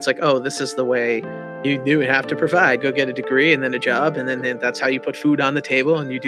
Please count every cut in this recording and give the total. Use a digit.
2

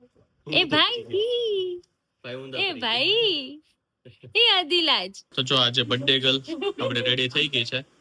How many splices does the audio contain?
1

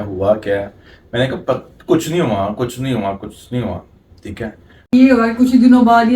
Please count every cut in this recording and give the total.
1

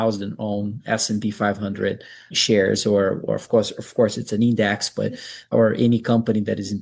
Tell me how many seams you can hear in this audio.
2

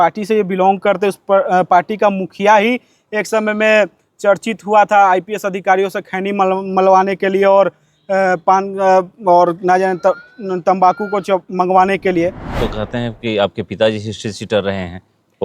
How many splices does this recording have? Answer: 1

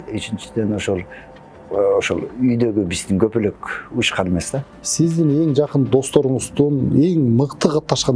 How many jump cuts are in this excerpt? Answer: 1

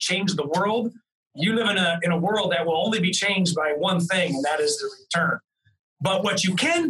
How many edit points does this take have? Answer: 0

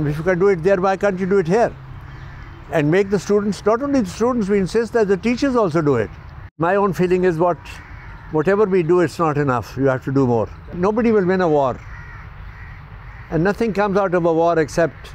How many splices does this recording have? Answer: 2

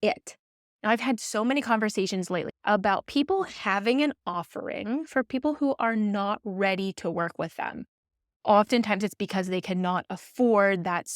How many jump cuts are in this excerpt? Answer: 1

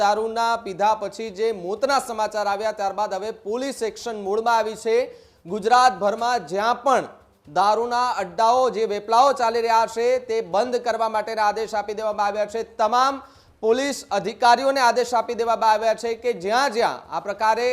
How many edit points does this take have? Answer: 0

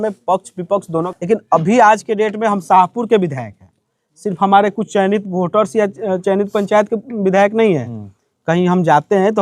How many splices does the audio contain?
1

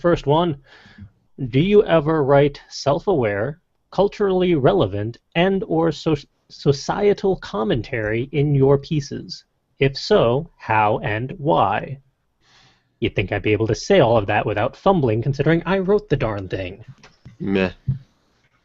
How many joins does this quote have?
1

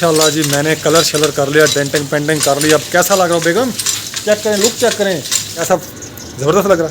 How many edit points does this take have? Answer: 1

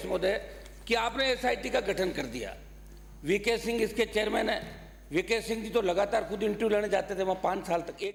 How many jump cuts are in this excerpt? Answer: 0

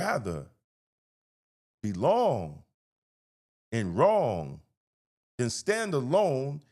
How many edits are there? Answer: 0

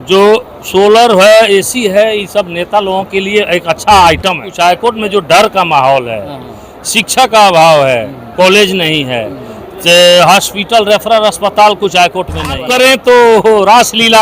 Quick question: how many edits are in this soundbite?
2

